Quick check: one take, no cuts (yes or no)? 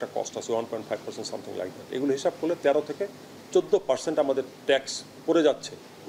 yes